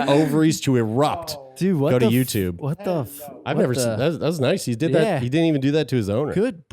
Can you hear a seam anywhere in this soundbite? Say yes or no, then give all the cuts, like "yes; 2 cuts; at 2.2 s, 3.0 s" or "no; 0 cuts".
no; 0 cuts